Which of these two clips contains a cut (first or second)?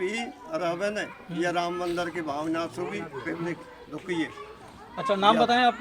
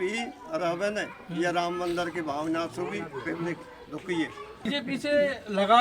second